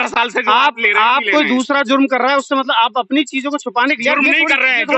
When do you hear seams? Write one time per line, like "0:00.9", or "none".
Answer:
none